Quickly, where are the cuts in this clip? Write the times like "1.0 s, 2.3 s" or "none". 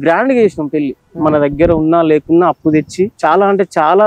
3.1 s